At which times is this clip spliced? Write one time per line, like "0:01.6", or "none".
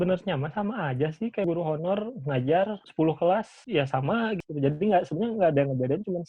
0:01.5
0:02.8
0:03.6
0:04.4